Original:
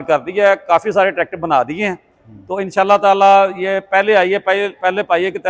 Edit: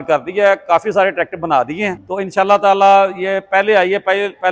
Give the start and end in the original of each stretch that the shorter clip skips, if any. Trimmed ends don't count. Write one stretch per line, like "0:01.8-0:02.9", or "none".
0:02.0-0:02.4